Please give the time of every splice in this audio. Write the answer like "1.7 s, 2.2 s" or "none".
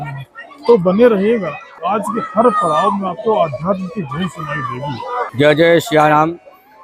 1.7 s, 5.3 s

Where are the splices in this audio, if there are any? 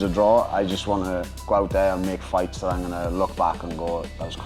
none

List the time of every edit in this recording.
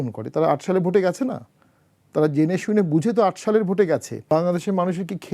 4.1 s

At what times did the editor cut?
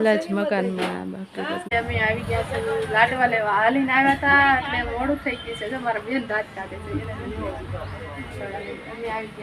1.7 s

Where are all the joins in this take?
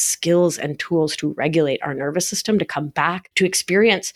3.2 s

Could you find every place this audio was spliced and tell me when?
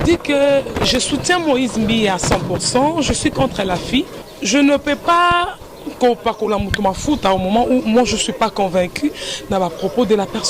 4.2 s

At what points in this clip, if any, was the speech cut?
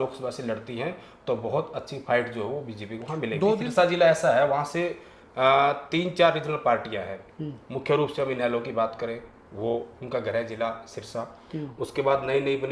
3.5 s

